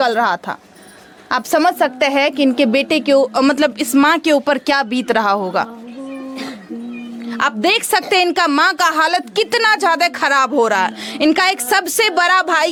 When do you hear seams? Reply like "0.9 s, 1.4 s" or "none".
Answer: none